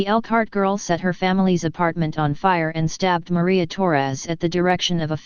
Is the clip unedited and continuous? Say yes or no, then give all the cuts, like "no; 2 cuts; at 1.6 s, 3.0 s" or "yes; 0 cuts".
no; 1 cut; at 3.7 s